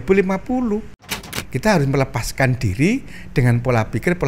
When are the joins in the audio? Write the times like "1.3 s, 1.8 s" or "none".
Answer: 1.2 s